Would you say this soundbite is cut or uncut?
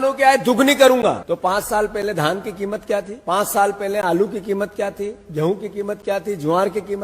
cut